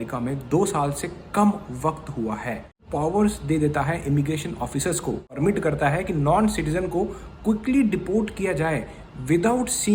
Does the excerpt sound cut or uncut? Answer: cut